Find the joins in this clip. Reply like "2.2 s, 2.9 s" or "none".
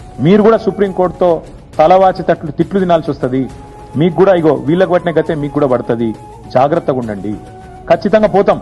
none

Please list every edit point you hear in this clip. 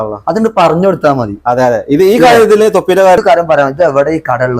3.2 s

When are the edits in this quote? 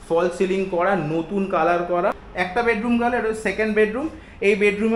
2.2 s

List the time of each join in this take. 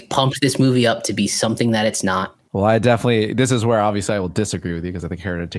2.5 s

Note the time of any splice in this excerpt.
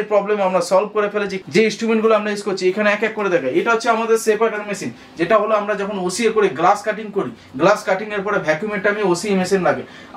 1.4 s

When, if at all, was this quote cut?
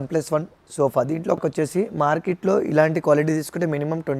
1.4 s

